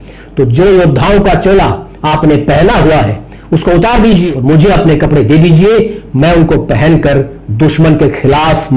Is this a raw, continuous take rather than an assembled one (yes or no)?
no